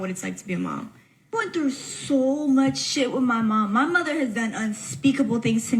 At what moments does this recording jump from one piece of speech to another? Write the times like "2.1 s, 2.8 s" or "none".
1.3 s

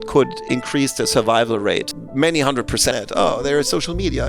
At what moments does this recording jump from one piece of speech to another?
2.9 s

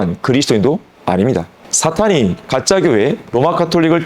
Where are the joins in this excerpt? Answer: 1.6 s

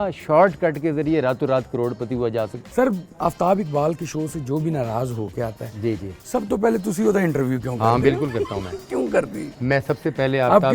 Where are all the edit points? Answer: 2.6 s

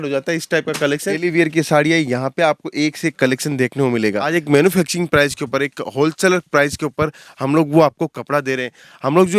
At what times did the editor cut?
1.2 s, 4.3 s

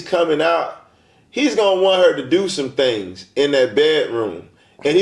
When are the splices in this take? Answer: none

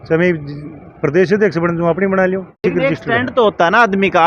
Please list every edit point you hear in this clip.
2.5 s

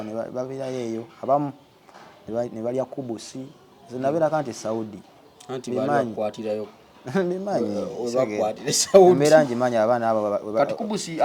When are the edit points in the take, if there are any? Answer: none

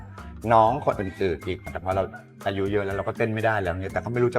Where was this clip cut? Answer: 1.8 s

